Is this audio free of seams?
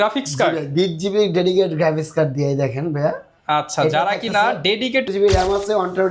no; 1 cut; at 5.1 s

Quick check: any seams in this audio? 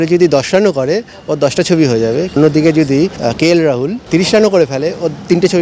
yes; 3 cuts; at 2.4 s, 3.1 s, 4.0 s

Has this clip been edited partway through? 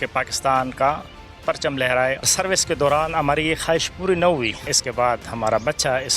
yes; 2 cuts; at 2.3 s, 4.8 s

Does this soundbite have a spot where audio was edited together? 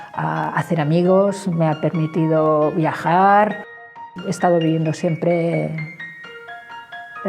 yes; 1 cut; at 3.9 s

